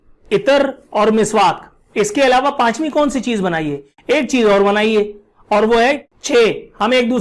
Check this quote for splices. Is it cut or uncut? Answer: cut